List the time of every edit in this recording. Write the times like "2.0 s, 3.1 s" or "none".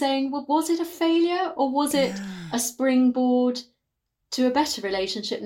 none

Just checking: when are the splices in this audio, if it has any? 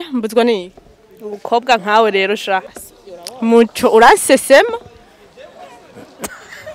2.7 s

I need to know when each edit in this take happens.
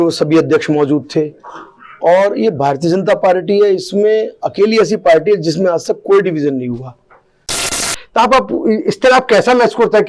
7.8 s

